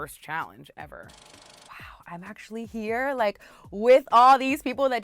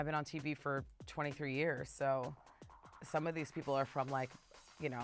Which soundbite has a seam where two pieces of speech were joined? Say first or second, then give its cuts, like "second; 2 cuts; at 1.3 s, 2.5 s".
first; 1 cut; at 1.6 s